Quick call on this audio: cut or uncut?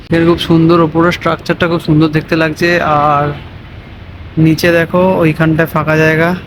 uncut